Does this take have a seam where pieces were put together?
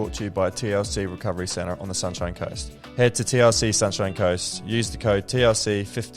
yes; 1 cut; at 2.8 s

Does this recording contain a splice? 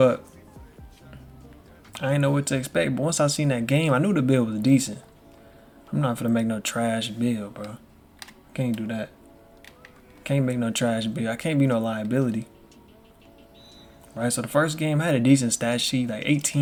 no; 0 cuts

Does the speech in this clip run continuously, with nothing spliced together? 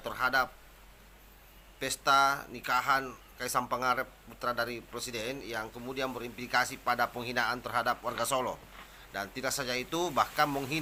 yes; 0 cuts

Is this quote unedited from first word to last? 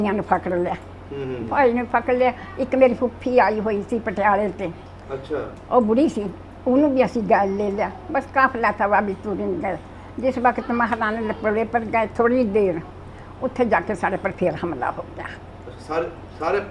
yes; 0 cuts

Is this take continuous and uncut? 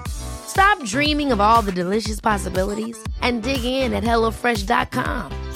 yes; 0 cuts

